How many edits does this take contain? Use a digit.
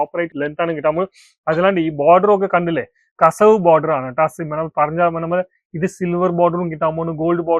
0